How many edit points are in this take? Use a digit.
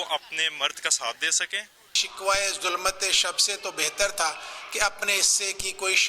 1